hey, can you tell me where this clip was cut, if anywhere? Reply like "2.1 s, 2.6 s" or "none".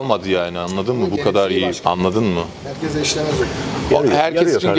none